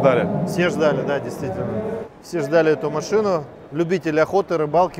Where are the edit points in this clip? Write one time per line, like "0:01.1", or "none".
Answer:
0:02.1